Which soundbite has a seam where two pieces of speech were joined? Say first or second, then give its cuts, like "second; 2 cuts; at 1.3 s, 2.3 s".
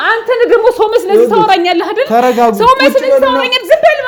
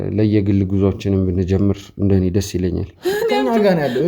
second; 1 cut; at 2.9 s